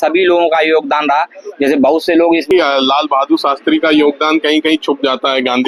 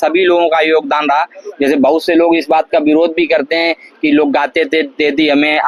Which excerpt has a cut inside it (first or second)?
first